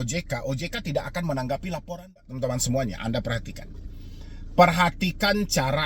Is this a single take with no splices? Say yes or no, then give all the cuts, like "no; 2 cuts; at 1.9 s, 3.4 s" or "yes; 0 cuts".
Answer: no; 1 cut; at 2.3 s